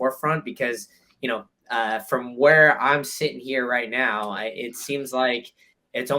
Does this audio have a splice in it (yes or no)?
no